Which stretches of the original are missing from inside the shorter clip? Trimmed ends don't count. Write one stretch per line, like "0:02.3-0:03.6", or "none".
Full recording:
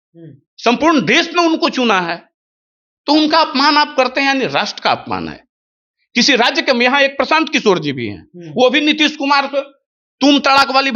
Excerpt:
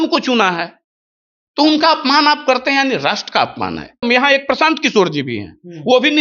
0:05.5-0:06.7